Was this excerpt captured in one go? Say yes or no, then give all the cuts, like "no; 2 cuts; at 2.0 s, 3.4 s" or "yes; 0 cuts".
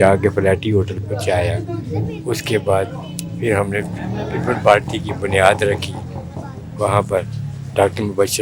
yes; 0 cuts